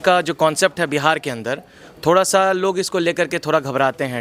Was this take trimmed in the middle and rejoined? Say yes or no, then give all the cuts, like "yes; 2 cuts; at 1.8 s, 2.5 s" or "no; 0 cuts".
no; 0 cuts